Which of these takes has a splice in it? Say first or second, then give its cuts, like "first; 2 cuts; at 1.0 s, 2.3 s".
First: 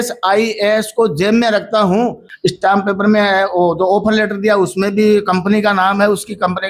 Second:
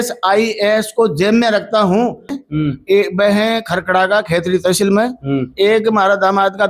second; 1 cut; at 2.3 s